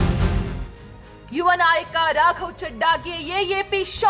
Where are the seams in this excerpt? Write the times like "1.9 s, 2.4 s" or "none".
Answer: 1.2 s